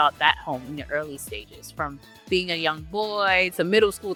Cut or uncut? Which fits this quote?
uncut